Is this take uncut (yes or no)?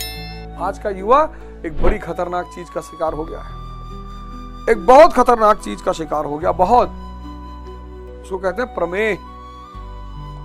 no